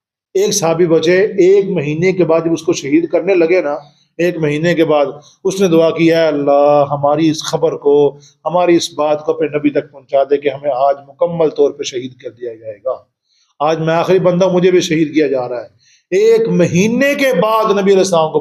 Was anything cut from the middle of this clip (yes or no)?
no